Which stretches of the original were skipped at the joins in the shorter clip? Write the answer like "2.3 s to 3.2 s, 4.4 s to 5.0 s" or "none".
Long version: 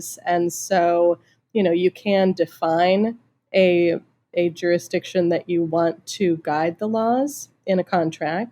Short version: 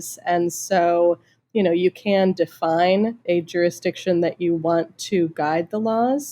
3.2 s to 4.3 s